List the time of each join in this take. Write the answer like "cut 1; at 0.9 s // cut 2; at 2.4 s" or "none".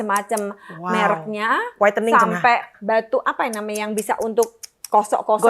cut 1; at 2.7 s